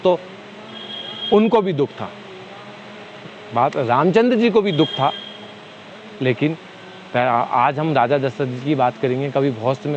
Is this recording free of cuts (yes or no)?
yes